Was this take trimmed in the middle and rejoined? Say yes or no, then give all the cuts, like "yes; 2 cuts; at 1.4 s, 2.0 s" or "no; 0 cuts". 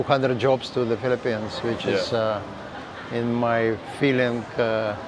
no; 0 cuts